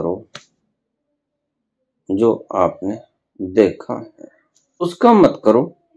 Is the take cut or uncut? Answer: cut